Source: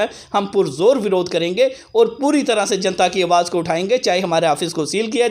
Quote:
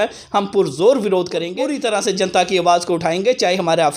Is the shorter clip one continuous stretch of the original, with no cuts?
no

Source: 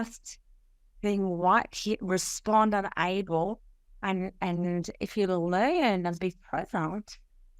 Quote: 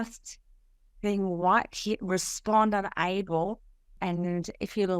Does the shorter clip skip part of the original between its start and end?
yes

